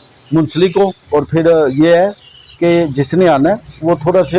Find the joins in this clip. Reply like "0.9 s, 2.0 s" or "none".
1.0 s